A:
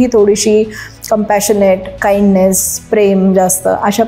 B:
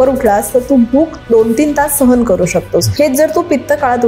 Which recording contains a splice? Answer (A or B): B